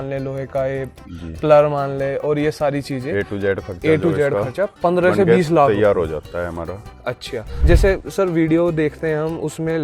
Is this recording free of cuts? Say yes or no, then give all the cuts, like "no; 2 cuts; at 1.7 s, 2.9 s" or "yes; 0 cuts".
no; 1 cut; at 7.5 s